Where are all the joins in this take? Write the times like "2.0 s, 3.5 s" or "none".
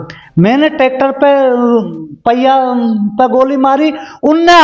none